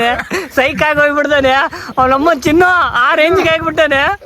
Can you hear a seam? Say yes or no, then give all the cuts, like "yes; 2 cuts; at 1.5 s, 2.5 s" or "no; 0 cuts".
no; 0 cuts